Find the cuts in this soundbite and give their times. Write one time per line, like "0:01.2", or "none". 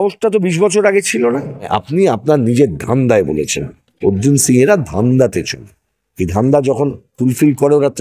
0:01.7